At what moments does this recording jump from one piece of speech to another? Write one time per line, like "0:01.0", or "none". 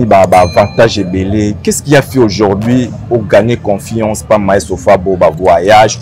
none